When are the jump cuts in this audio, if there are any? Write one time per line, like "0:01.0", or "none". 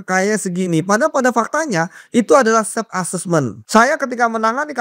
0:03.6